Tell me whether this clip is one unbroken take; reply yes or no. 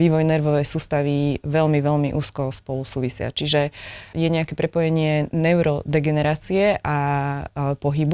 no